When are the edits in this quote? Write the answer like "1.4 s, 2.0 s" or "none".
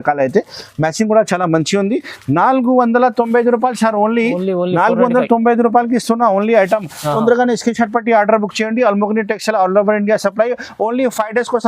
none